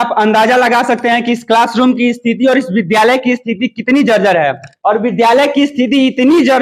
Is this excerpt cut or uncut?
cut